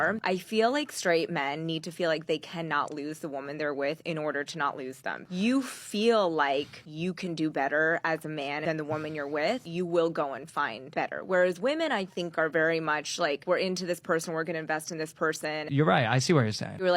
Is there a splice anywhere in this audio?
yes; 2 cuts; at 0.9 s, 14.1 s

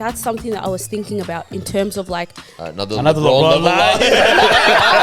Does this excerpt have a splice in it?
no; 0 cuts

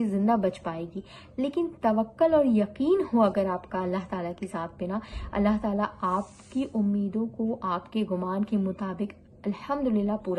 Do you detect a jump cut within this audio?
no; 0 cuts

